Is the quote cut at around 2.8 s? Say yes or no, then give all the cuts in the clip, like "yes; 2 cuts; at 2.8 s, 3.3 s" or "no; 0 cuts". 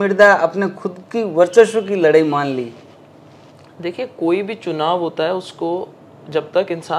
no; 0 cuts